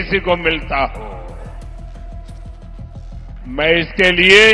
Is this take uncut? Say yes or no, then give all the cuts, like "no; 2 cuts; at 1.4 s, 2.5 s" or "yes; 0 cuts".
no; 2 cuts; at 1.4 s, 3.4 s